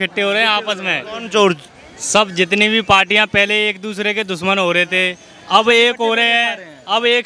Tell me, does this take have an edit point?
no; 0 cuts

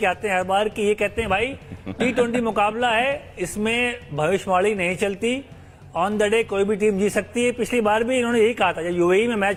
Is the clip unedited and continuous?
yes; 0 cuts

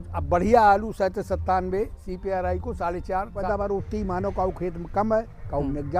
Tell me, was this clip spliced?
yes; 1 cut; at 3.4 s

